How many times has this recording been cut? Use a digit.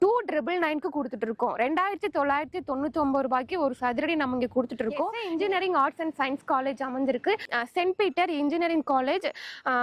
1